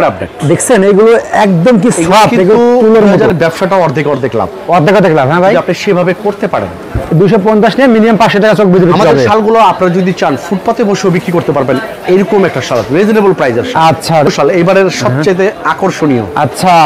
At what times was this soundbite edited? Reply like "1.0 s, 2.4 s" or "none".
3.3 s, 14.3 s

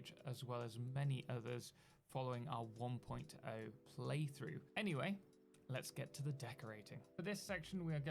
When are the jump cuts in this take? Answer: 7.2 s

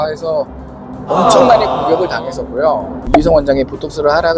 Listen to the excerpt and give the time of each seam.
3.0 s

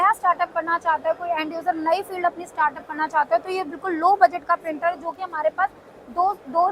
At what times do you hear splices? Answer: none

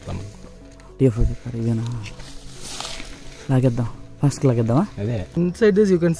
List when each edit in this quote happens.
5.3 s

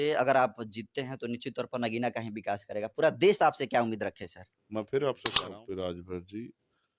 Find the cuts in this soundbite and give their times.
5.4 s

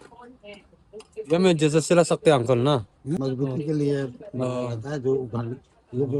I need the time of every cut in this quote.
3.0 s

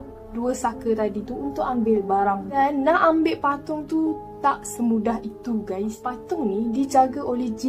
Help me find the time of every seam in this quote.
2.5 s, 6.1 s

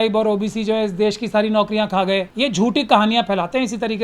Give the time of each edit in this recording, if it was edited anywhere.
2.3 s

